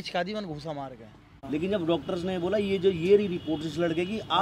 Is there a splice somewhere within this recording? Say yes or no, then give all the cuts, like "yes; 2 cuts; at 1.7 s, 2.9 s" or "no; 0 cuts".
yes; 1 cut; at 1.4 s